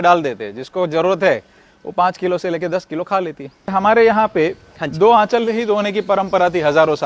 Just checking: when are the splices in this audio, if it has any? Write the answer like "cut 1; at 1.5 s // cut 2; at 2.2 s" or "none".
cut 1; at 3.7 s